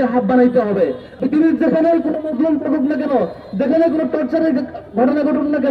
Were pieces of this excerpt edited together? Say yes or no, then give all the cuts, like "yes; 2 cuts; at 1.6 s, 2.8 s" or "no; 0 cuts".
yes; 1 cut; at 1.1 s